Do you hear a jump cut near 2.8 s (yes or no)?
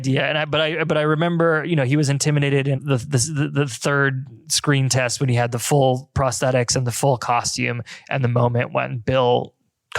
yes